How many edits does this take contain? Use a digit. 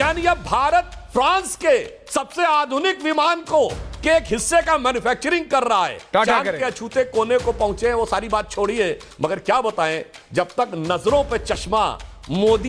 1